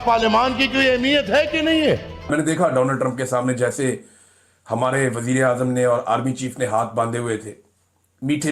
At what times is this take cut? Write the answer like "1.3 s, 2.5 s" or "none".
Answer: 2.2 s